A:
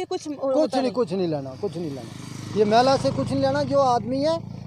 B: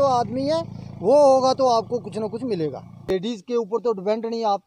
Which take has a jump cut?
B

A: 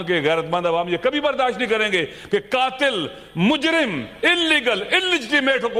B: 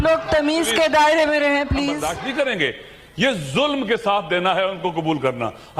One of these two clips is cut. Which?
B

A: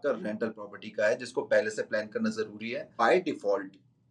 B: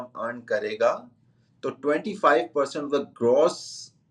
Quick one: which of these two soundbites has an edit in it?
A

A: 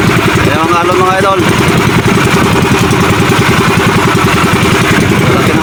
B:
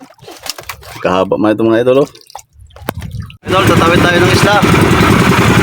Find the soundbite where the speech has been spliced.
B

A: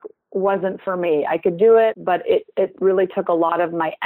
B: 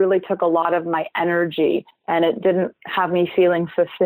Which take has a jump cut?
A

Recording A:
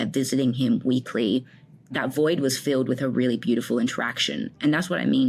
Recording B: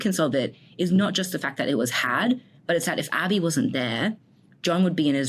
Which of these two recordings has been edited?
A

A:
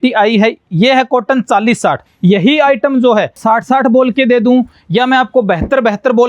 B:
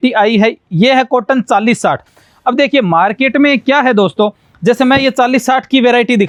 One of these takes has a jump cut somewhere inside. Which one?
A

